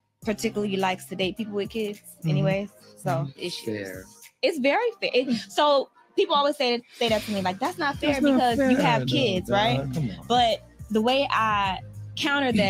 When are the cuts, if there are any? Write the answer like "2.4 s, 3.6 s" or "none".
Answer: none